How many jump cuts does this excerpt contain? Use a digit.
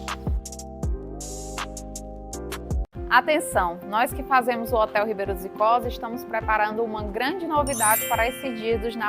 1